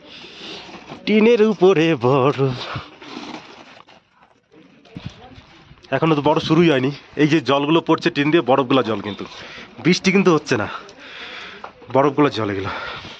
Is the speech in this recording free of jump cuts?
no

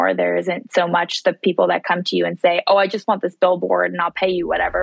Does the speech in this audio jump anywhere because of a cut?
no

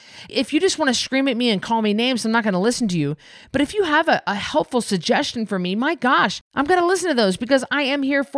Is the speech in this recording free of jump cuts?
no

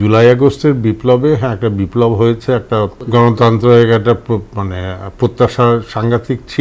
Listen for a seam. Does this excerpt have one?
yes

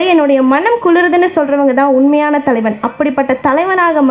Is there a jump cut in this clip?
no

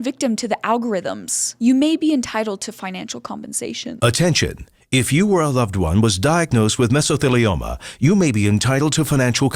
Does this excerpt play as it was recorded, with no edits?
yes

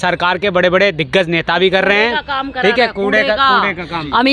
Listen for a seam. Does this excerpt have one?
no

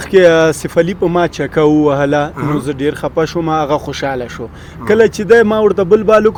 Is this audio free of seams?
yes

